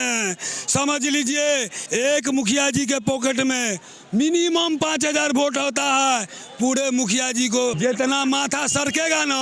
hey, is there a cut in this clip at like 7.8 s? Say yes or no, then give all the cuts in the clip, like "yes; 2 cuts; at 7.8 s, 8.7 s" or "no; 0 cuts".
yes; 2 cuts; at 1.8 s, 7.8 s